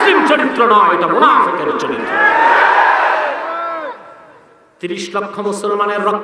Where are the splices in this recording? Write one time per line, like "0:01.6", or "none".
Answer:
0:04.5